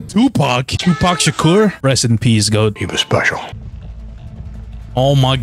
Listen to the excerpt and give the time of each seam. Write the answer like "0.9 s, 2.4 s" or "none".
3.6 s